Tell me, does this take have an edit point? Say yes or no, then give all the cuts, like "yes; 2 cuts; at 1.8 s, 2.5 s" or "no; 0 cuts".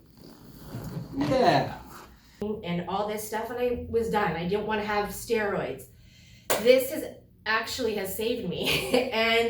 yes; 1 cut; at 2.4 s